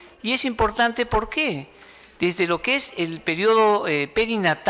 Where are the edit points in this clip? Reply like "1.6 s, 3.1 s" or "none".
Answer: none